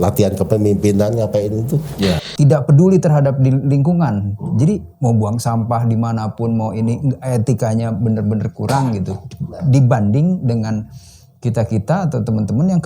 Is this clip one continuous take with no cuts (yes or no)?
no